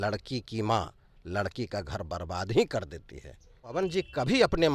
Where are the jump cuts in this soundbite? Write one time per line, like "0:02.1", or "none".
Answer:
0:03.7